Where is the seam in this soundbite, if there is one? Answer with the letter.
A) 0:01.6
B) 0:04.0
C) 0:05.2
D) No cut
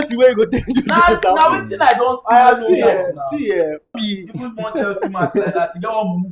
B